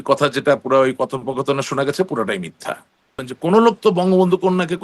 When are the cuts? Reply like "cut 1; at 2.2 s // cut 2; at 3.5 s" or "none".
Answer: cut 1; at 3.3 s